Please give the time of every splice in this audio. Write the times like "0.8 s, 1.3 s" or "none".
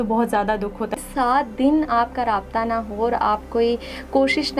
0.9 s